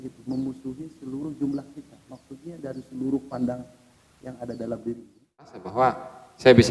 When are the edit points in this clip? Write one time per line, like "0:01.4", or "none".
0:05.6